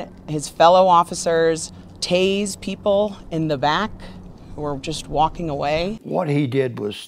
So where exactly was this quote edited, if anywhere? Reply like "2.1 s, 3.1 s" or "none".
6.0 s